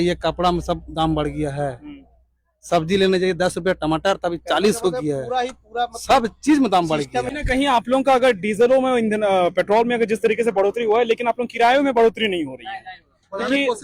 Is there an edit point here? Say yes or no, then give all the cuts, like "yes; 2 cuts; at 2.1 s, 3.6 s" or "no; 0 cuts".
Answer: yes; 1 cut; at 7.4 s